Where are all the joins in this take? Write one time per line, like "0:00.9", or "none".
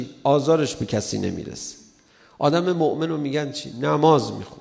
none

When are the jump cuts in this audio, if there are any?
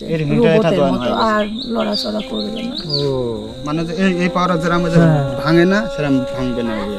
none

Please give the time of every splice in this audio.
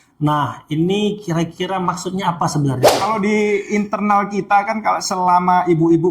0:03.0

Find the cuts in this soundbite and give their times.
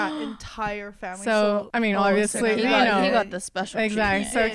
0:01.7

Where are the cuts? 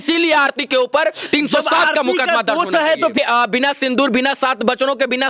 0:03.1

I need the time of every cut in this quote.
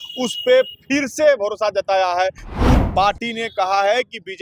0:02.8

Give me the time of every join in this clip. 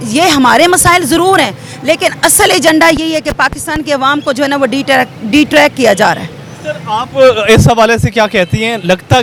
none

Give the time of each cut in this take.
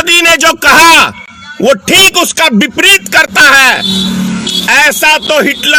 none

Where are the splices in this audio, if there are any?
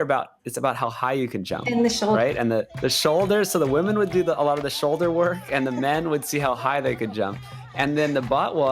0:02.7

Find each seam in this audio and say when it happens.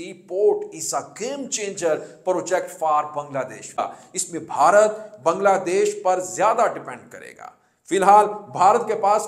0:03.8

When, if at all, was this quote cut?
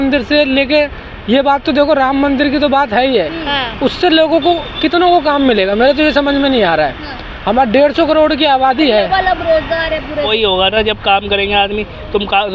0:10.3

